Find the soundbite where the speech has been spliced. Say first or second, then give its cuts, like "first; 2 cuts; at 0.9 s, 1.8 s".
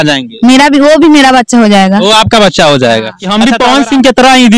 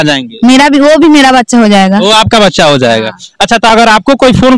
first; 1 cut; at 3.2 s